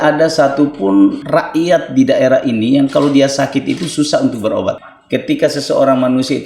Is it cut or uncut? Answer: cut